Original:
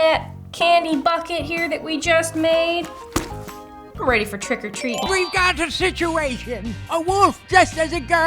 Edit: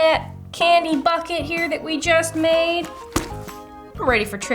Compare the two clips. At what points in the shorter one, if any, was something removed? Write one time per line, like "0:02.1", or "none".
none